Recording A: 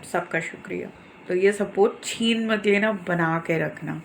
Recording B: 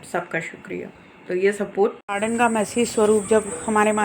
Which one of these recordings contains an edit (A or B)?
B